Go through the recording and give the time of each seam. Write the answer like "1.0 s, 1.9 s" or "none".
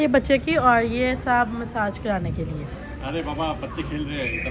none